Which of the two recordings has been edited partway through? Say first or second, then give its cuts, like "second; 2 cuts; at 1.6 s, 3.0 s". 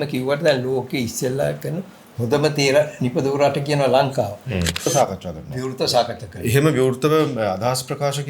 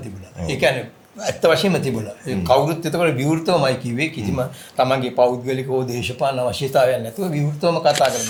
first; 1 cut; at 4.9 s